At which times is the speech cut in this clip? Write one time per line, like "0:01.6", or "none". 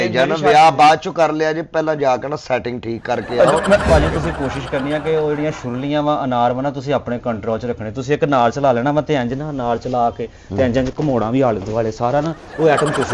0:03.9